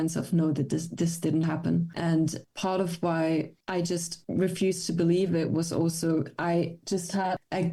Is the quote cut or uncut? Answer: uncut